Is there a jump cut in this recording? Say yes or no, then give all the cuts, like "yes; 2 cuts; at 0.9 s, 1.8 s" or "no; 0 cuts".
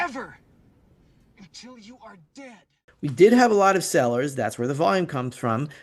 yes; 1 cut; at 2.9 s